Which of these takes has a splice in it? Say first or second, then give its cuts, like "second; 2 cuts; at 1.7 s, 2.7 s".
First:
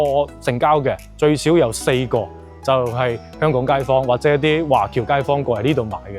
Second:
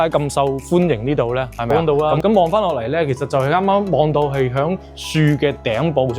second; 1 cut; at 1.7 s